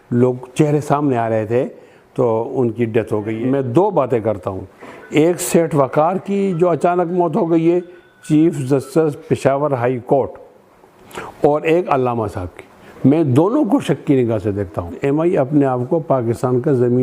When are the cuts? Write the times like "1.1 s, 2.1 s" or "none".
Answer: 3.4 s, 14.9 s